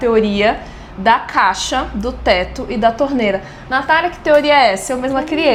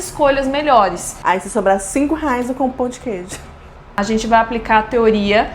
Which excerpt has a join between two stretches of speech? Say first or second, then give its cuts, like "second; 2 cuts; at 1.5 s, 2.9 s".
second; 2 cuts; at 1.1 s, 3.9 s